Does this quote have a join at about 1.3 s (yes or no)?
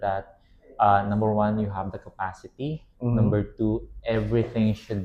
no